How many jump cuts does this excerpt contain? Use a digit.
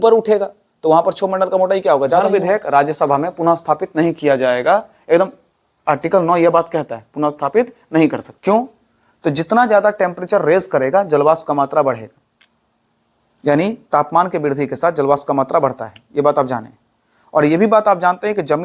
2